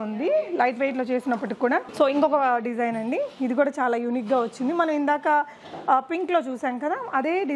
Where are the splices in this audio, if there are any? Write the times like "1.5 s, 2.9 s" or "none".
none